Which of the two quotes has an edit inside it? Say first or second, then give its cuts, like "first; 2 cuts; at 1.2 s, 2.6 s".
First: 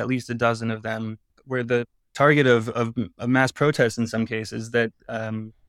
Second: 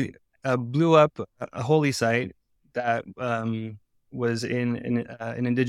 first; 1 cut; at 1.3 s